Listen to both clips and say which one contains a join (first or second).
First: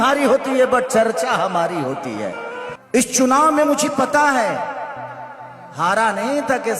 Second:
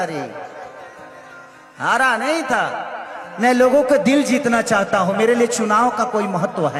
first